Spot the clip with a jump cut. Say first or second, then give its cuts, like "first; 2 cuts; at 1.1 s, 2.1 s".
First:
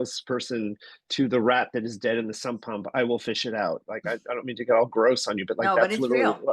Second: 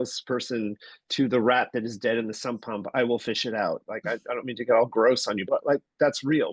second; 1 cut; at 5.4 s